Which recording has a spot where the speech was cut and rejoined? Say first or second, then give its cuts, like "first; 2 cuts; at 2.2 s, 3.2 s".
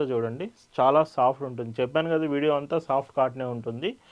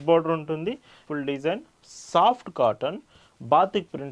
second; 1 cut; at 1.0 s